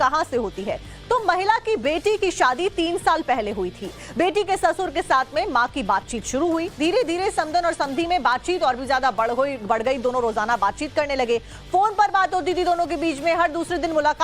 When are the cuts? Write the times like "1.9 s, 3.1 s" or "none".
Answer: none